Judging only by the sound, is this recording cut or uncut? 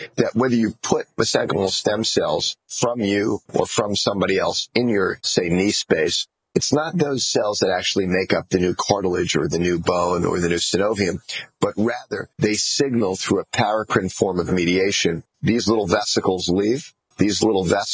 uncut